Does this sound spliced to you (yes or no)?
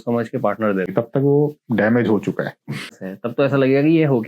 yes